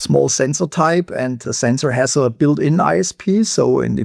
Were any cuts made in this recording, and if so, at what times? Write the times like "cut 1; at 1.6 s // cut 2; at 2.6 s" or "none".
cut 1; at 1.4 s